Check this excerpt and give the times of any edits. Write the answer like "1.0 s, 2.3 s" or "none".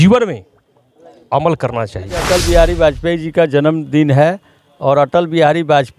2.2 s